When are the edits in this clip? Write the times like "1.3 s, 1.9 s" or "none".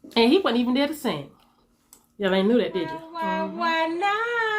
3.0 s